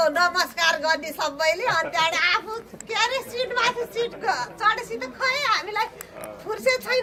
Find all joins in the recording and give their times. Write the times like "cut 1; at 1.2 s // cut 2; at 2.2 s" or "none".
none